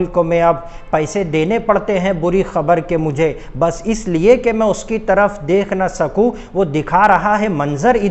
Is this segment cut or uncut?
uncut